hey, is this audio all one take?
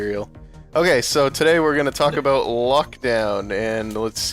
no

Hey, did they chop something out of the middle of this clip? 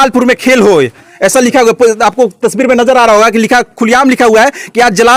no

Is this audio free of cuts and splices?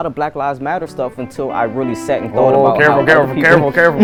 yes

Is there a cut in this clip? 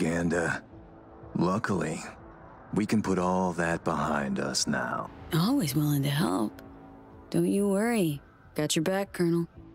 yes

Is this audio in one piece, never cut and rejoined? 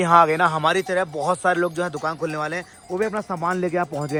yes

